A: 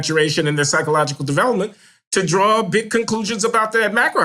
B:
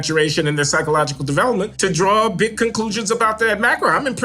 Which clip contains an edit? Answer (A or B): B